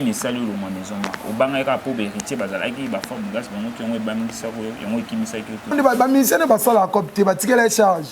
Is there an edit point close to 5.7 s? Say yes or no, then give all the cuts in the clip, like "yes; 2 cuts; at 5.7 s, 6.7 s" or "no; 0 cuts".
yes; 1 cut; at 5.7 s